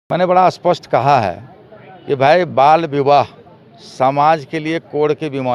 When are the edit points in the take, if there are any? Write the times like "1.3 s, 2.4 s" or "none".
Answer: none